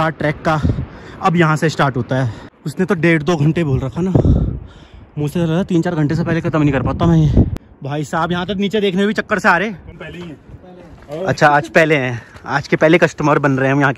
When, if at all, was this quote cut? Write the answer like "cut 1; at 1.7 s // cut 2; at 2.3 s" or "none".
cut 1; at 2.4 s // cut 2; at 7.5 s // cut 3; at 9.9 s